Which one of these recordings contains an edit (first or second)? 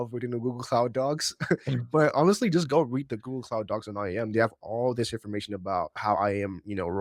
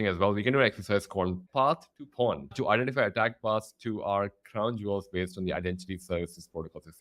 second